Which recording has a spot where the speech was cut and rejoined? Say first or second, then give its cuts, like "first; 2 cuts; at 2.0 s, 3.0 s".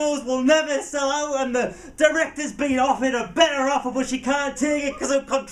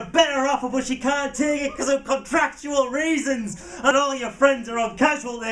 second; 1 cut; at 3.9 s